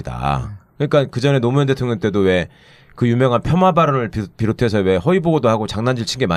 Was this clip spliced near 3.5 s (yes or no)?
no